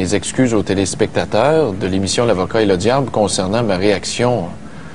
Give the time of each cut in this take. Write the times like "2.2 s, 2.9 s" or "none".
none